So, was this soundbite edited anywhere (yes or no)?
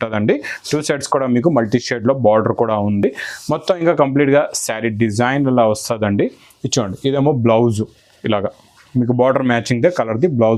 no